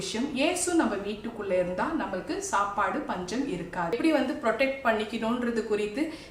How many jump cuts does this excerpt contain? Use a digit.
1